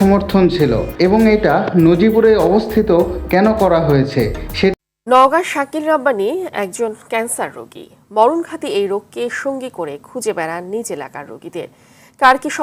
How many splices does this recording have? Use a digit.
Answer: 1